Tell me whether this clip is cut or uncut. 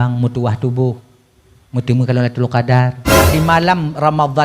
cut